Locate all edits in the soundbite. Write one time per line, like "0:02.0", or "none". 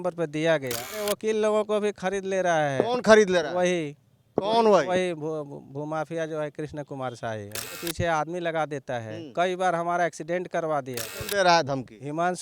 0:00.9
0:07.7
0:11.2